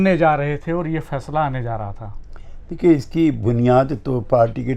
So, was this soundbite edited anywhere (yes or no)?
no